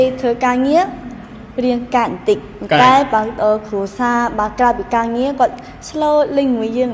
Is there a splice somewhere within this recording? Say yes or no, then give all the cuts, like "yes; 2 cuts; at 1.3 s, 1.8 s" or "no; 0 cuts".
no; 0 cuts